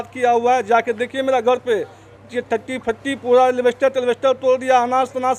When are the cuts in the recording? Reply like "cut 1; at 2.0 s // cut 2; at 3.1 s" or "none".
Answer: none